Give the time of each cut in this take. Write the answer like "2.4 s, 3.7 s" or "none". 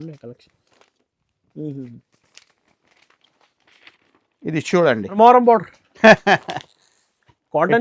5.2 s